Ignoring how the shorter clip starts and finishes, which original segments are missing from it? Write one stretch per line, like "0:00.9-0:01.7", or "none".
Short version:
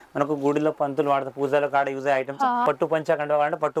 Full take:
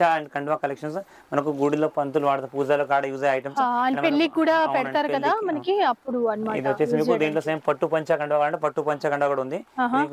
0:03.8-0:07.6